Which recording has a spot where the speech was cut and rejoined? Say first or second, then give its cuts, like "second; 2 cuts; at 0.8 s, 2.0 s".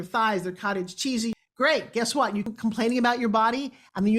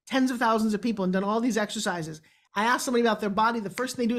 first; 2 cuts; at 1.3 s, 2.5 s